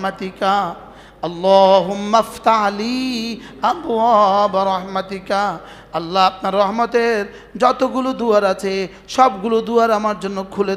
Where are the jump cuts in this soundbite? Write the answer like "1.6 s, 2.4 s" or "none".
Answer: none